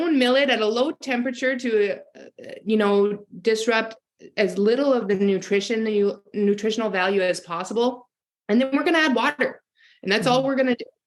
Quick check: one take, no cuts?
yes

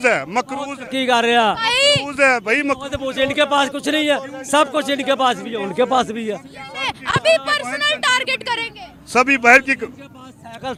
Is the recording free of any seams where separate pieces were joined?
yes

